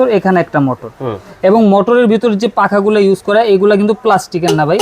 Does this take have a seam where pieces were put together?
no; 0 cuts

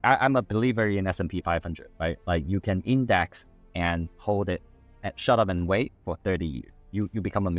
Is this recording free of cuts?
yes; 0 cuts

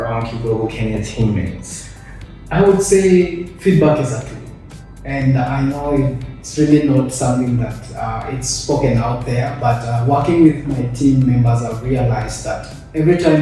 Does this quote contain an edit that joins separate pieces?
no; 0 cuts

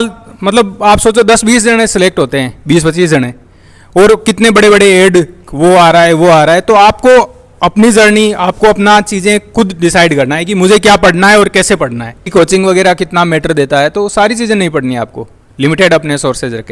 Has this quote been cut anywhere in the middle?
yes; 1 cut; at 12.3 s

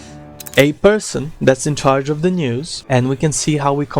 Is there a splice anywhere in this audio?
yes; 1 cut; at 2.7 s

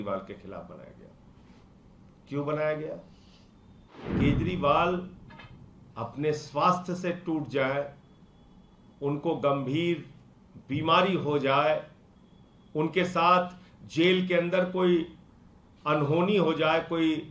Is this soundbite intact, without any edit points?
no; 1 cut; at 4.0 s

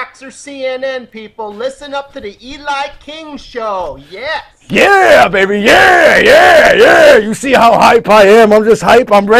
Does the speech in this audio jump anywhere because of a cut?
no; 0 cuts

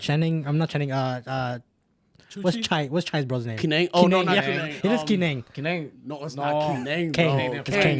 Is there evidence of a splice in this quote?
no; 0 cuts

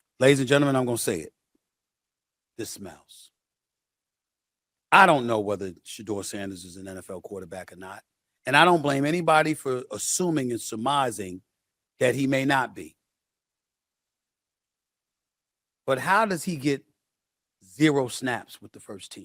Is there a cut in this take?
no; 0 cuts

